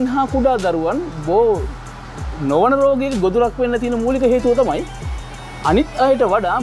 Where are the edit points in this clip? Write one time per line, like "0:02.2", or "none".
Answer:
none